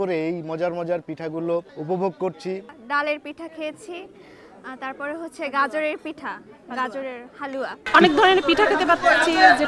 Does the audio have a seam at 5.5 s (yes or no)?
no